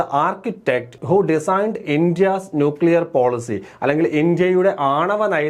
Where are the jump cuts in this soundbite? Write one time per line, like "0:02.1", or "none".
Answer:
0:00.9